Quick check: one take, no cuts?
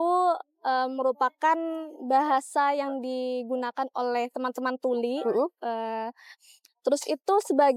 yes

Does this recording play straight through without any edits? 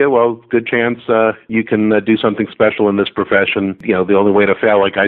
no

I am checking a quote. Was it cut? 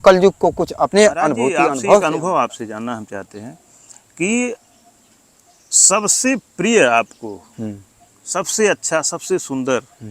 yes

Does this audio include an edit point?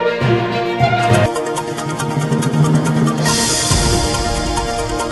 no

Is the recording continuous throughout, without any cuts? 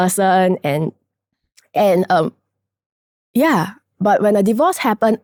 yes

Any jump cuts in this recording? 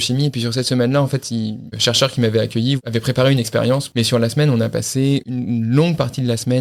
yes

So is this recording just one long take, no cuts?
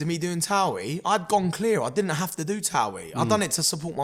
yes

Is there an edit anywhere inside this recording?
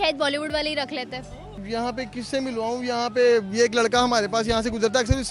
yes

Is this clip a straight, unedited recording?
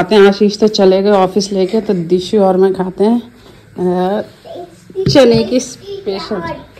yes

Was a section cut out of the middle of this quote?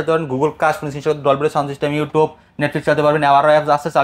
no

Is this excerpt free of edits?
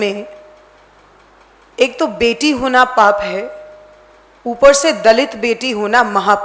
yes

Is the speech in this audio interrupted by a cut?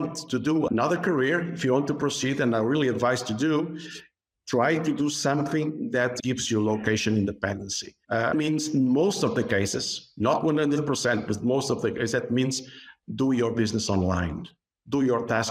no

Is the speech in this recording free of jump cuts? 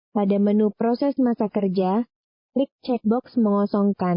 no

